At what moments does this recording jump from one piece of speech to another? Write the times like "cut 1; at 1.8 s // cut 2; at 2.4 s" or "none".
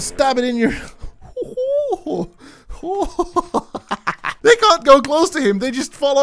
cut 1; at 4.3 s